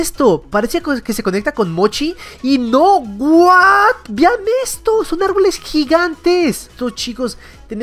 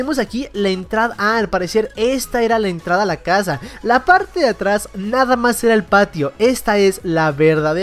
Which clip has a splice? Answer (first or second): first